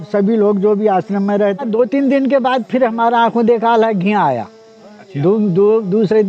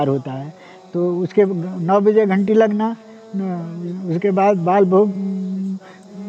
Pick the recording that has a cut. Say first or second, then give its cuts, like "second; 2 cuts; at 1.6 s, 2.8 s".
first; 1 cut; at 1.6 s